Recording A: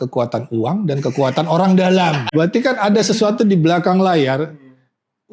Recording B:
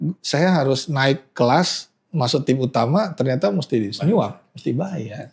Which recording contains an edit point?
A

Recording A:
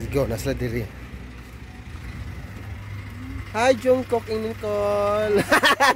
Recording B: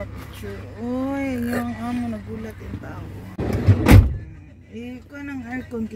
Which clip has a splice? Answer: B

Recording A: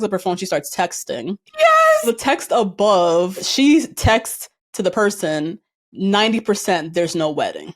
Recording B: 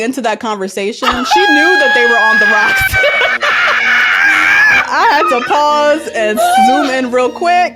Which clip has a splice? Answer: A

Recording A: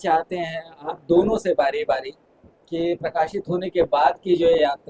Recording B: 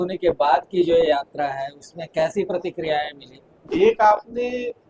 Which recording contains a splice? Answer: B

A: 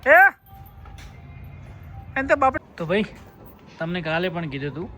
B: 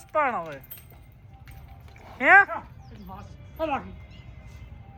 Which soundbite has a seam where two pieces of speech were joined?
A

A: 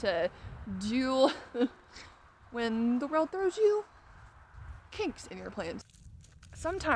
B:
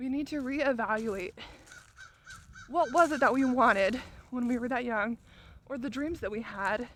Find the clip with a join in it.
A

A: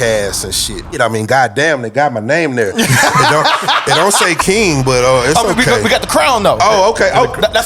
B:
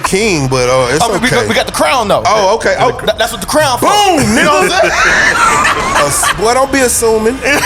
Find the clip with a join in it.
A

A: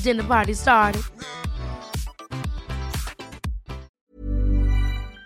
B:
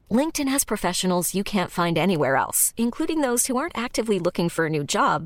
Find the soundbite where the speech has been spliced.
A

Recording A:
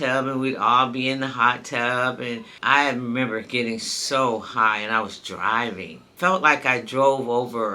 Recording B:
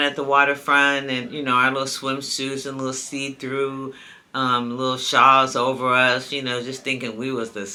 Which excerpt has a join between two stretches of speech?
A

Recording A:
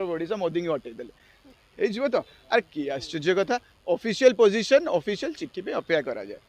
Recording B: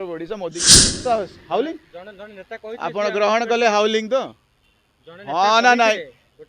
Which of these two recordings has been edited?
B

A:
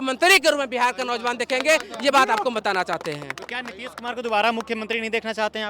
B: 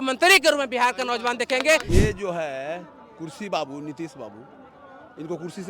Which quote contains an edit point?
B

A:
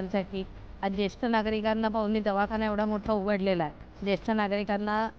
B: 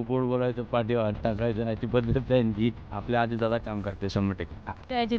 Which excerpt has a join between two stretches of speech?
B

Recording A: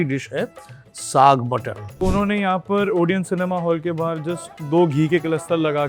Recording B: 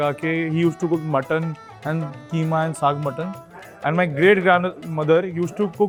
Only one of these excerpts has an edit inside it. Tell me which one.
A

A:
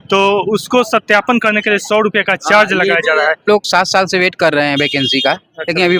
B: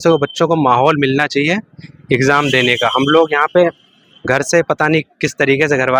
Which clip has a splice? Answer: A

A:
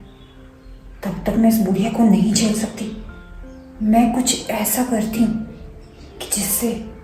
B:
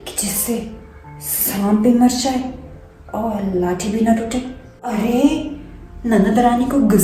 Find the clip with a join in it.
B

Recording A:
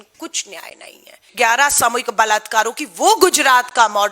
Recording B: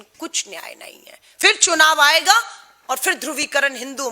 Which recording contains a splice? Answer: A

